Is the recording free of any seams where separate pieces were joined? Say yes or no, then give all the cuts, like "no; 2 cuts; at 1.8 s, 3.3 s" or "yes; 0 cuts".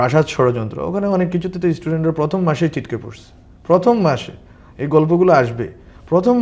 yes; 0 cuts